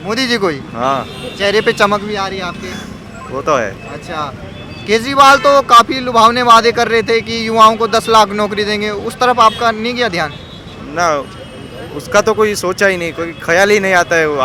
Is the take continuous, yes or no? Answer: yes